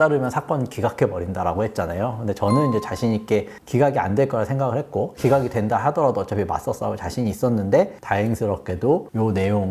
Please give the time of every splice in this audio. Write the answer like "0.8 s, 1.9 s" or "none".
none